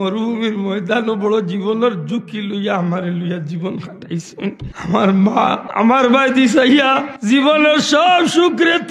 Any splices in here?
yes; 3 cuts; at 4.7 s, 5.6 s, 7.1 s

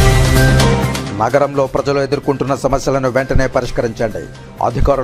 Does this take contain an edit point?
yes; 1 cut; at 1.0 s

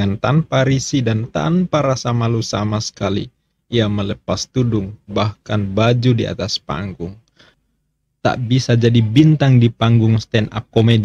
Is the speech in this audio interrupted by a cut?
yes; 1 cut; at 7.6 s

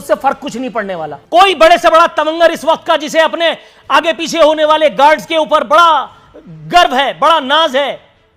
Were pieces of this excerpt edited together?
yes; 1 cut; at 1.1 s

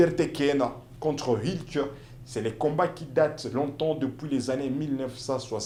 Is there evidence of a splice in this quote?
no; 0 cuts

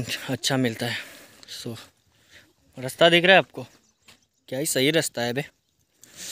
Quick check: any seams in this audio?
no; 0 cuts

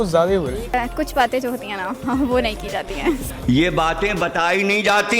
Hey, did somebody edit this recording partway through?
yes; 2 cuts; at 0.7 s, 3.3 s

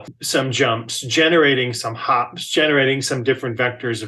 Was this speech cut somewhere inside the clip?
no; 0 cuts

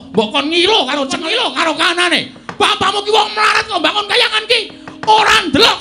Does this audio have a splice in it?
yes; 1 cut; at 1.1 s

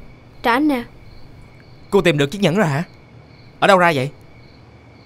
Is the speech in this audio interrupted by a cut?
no; 0 cuts

